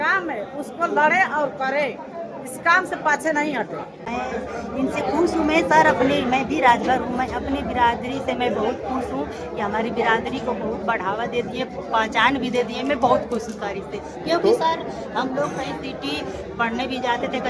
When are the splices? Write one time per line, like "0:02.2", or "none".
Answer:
0:04.1